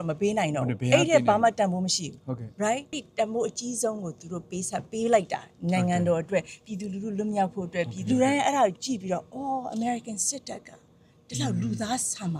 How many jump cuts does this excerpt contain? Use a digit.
2